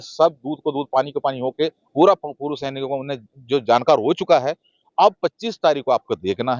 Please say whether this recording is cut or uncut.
uncut